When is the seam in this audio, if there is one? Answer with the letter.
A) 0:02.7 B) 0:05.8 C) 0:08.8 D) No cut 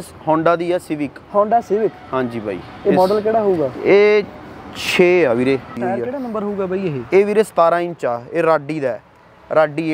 B